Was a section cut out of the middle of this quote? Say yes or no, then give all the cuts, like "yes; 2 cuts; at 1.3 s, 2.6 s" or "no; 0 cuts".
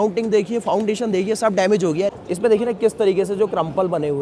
yes; 1 cut; at 2.1 s